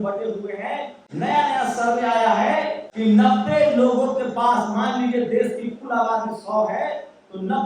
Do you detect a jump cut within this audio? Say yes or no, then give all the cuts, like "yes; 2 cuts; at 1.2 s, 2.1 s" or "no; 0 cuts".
yes; 2 cuts; at 1.0 s, 2.8 s